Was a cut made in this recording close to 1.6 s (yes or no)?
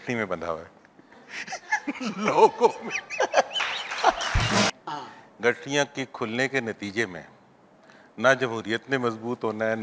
no